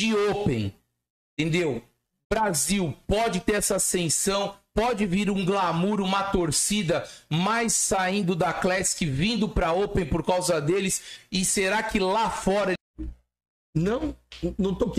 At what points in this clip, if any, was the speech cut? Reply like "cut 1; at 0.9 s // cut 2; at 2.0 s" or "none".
cut 1; at 12.8 s